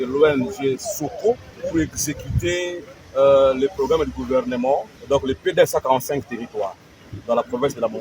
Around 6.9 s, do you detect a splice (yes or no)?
no